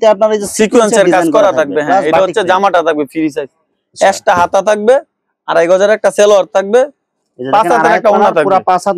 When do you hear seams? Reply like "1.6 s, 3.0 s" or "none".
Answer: none